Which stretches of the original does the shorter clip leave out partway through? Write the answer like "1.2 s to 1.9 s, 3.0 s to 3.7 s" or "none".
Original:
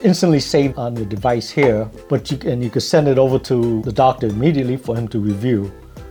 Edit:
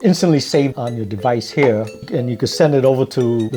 2.0 s to 2.3 s

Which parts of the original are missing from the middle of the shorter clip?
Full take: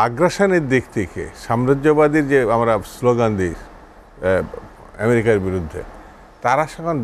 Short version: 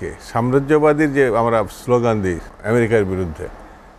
3.6 s to 4.8 s

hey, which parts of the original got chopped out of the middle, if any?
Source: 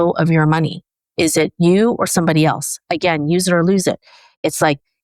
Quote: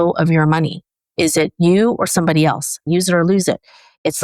2.8 s to 3.2 s

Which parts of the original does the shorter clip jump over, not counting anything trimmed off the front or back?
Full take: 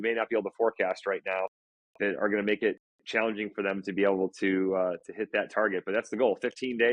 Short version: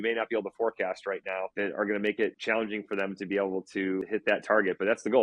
1.5 s to 1.9 s, 2.8 s to 3.0 s, 4.7 s to 5.1 s

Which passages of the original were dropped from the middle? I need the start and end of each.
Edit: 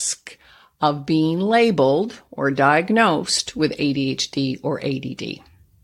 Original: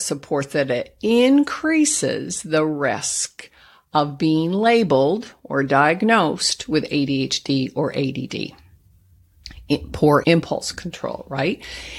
none

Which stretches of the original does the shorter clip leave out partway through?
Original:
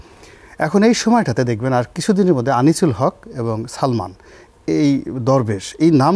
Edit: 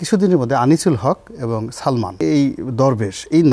4.1 s to 4.6 s

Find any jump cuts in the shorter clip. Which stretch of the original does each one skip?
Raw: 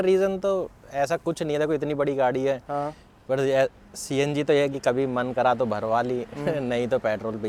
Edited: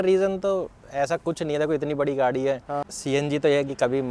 2.9 s to 3.9 s

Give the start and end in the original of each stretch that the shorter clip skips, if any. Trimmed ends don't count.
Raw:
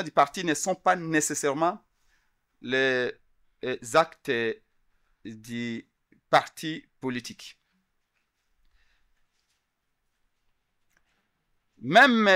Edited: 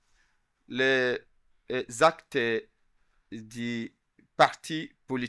none

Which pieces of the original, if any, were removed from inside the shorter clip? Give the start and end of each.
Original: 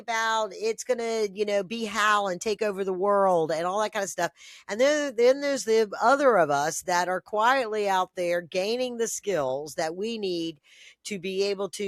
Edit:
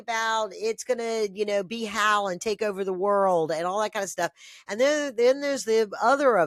none

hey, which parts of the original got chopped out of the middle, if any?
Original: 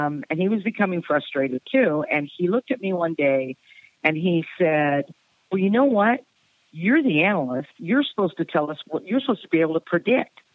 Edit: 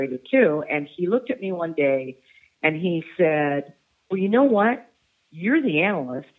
none

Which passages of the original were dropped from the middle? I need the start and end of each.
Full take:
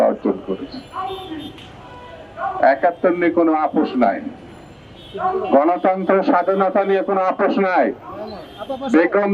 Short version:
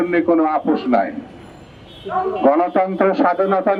none

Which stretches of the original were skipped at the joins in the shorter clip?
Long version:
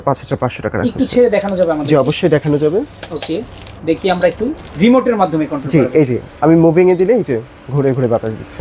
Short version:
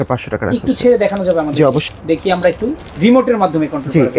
2.2 s to 3.6 s

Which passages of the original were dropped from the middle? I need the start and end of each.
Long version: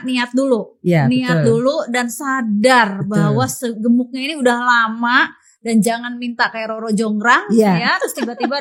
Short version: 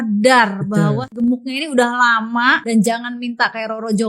3.5 s to 3.7 s, 5.3 s to 5.6 s

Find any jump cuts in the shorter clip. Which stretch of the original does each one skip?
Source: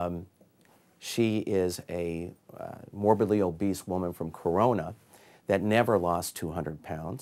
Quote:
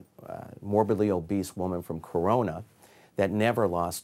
none

